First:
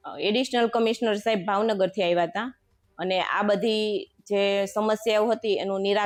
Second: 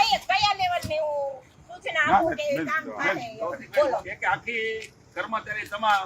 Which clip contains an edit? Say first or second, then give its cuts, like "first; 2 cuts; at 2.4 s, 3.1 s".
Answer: second; 1 cut; at 4.1 s